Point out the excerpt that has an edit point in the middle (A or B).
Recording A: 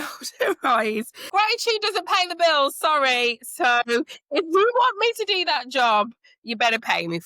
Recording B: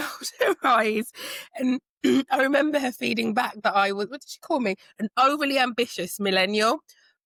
A